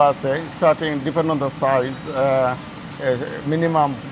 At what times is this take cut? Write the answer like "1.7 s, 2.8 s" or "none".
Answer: none